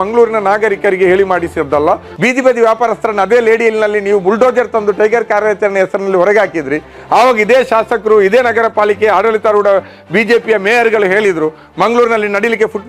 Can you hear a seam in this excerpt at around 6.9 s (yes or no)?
no